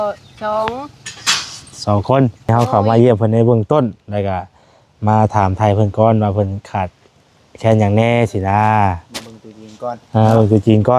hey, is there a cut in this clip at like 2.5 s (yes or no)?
yes